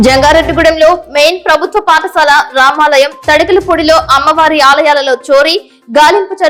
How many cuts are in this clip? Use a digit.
0